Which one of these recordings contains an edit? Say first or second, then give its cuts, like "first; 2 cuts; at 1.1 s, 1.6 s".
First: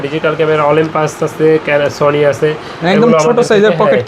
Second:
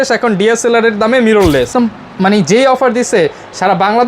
second; 1 cut; at 1.7 s